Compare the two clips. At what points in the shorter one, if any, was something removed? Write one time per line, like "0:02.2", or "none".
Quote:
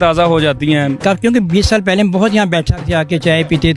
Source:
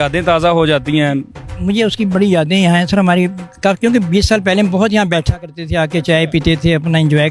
0:01.0
0:02.8